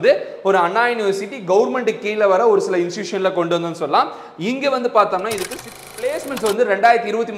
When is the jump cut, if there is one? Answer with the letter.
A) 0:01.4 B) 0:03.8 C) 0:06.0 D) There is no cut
C